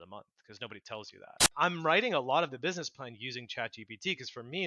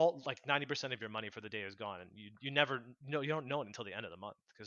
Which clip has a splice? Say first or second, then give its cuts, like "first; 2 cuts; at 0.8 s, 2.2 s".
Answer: first; 1 cut; at 1.5 s